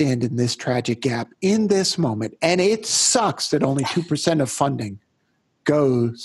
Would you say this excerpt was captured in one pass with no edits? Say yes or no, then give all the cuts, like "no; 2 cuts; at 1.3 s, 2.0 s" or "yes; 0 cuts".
yes; 0 cuts